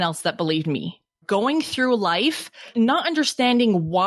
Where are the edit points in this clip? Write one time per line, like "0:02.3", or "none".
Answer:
0:01.2
0:02.7